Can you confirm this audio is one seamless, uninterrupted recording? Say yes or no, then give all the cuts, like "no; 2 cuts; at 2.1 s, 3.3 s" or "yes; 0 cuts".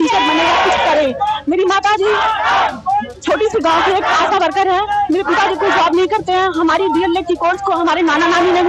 yes; 0 cuts